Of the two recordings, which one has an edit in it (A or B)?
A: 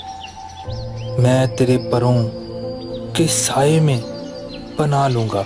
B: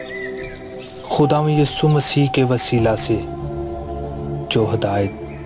B